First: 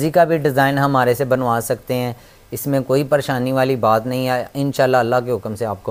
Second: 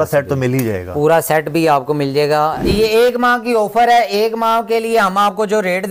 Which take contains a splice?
second; 1 cut; at 2.6 s

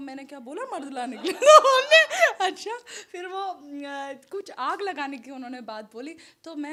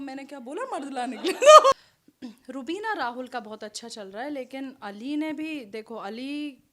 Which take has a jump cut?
second; 1 cut; at 1.7 s

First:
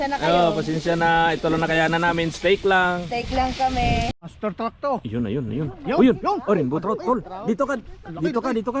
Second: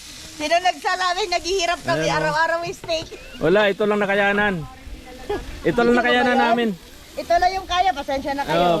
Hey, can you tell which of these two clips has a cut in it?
first; 1 cut; at 4.2 s

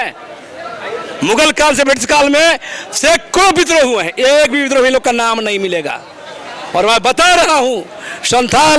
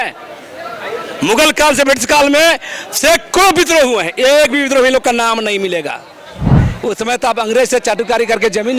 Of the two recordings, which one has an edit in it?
second; 1 cut; at 6.5 s

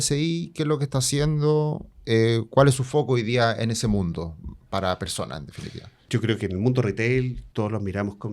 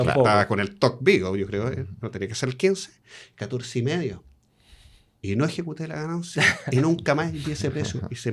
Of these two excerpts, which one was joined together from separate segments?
first; 2 cuts; at 6.0 s, 7.4 s

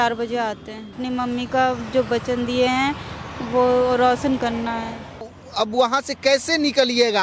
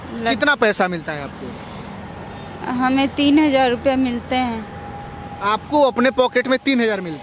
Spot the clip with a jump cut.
first; 2 cuts; at 1.0 s, 5.4 s

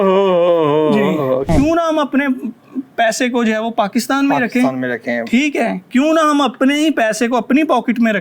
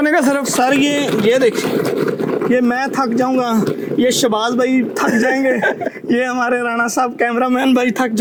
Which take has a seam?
first; 1 cut; at 1.5 s

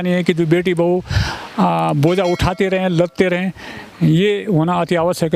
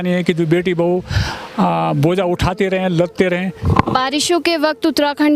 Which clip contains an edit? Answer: second; 1 cut; at 3.6 s

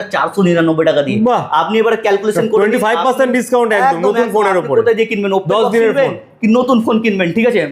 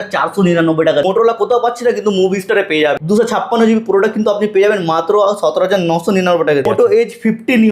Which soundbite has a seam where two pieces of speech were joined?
second; 3 cuts; at 1.0 s, 3.0 s, 6.6 s

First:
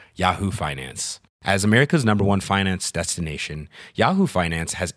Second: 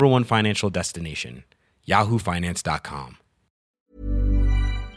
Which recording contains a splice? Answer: second; 1 cut; at 3.7 s

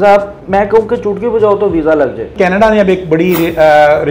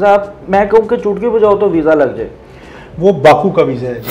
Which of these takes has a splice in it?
first; 1 cut; at 2.3 s

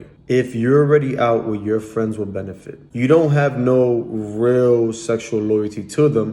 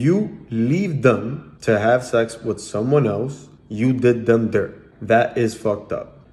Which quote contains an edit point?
first; 1 cut; at 2.8 s

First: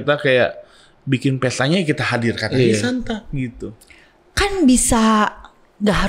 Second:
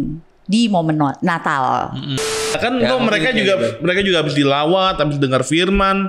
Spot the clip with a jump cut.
second; 1 cut; at 2.4 s

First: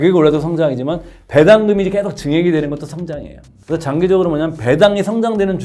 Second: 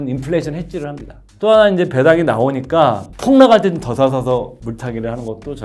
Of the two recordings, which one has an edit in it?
second; 3 cuts; at 1.2 s, 3.1 s, 4.6 s

